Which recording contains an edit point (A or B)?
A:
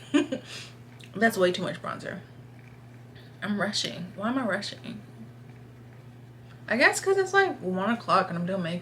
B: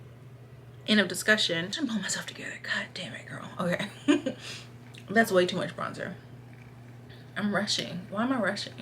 B